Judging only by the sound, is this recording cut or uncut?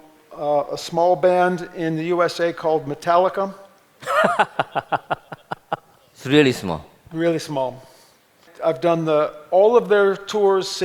uncut